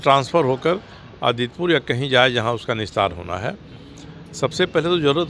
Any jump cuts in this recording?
no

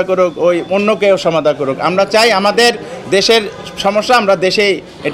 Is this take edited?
no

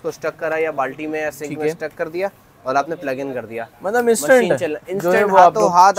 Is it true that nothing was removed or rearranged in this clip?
yes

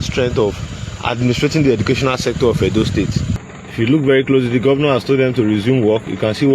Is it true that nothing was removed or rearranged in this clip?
no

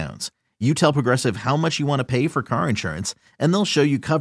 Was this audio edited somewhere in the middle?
no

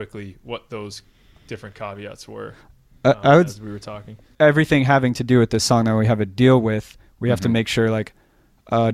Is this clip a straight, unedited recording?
no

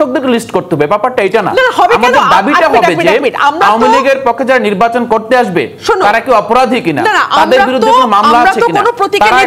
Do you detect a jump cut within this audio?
no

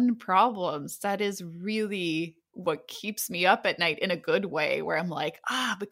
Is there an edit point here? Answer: no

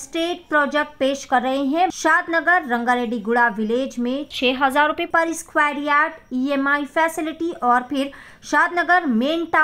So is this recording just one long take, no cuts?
no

